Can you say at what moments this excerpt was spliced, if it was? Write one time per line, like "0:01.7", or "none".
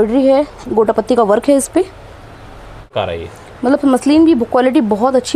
0:02.9